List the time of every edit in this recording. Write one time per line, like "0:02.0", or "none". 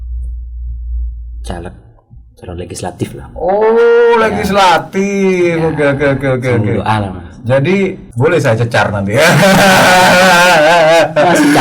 0:08.0